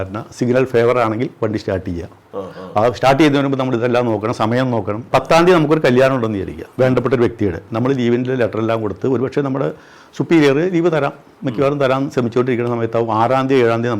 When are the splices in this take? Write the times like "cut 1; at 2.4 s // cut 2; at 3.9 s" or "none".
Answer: cut 1; at 5.0 s

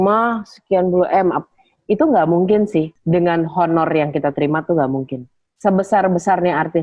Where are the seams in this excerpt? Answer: cut 1; at 3.0 s

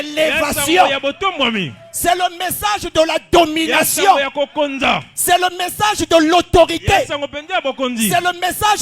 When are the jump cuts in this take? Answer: cut 1; at 5.6 s

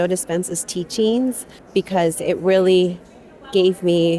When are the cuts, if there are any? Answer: cut 1; at 1.6 s

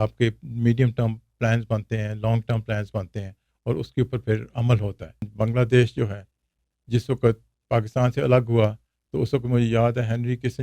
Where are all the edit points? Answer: cut 1; at 5.2 s

